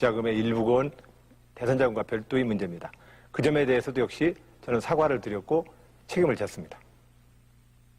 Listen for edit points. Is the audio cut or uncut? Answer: cut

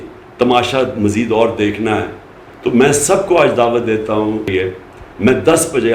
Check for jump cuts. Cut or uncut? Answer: cut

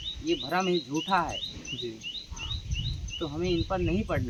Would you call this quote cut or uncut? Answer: uncut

